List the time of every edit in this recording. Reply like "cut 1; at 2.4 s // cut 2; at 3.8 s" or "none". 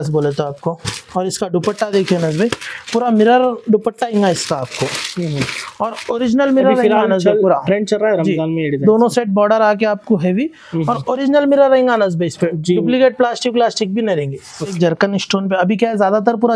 cut 1; at 14.7 s